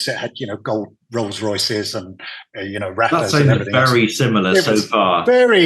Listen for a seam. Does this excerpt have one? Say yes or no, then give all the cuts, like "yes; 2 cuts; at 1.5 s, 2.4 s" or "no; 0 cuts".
no; 0 cuts